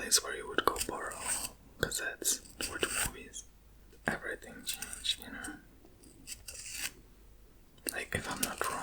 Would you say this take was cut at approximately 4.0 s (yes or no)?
yes